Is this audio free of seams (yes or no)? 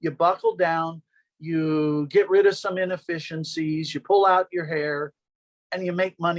yes